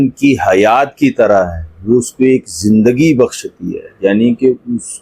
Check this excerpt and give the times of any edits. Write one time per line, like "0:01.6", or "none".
none